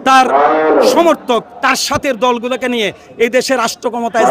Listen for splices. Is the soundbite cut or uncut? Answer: uncut